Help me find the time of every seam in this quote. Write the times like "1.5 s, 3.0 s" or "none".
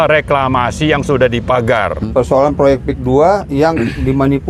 2.0 s

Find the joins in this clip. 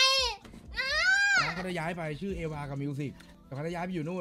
3.2 s

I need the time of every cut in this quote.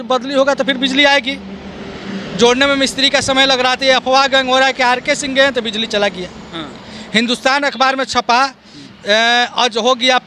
none

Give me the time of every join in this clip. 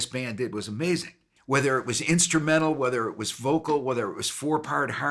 1.3 s

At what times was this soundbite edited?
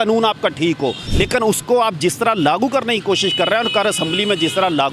1.0 s

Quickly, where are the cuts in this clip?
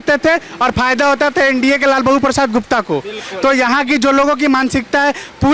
none

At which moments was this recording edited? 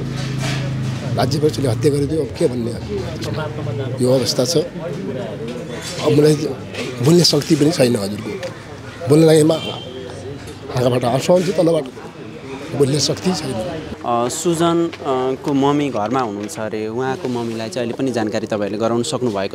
13.8 s

